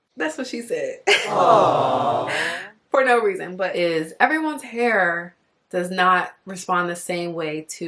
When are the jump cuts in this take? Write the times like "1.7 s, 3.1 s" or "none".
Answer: 3.5 s